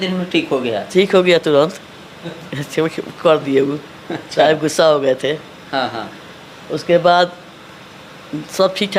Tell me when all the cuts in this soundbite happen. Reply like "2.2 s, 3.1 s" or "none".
none